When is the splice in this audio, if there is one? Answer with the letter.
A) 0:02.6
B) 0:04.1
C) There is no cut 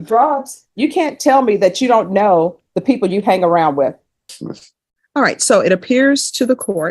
B